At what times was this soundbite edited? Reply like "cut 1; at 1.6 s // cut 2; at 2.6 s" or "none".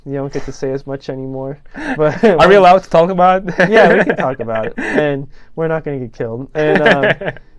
none